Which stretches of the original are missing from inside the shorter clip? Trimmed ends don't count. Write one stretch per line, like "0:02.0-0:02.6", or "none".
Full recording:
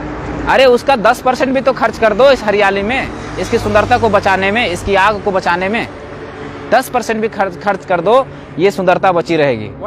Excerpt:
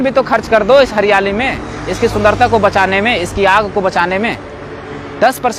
none